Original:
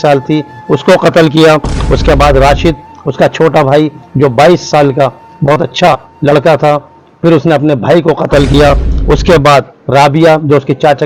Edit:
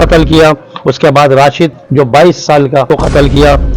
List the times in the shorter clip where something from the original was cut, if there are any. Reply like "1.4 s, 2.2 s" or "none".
1.8 s, 2.9 s